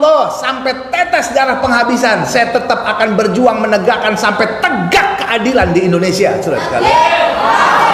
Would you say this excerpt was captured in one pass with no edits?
yes; 0 cuts

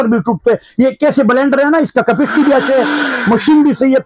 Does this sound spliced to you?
no; 0 cuts

